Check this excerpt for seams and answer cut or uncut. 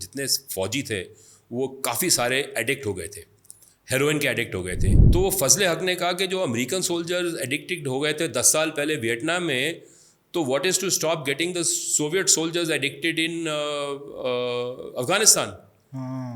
cut